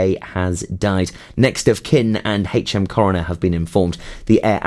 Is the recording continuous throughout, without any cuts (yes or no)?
no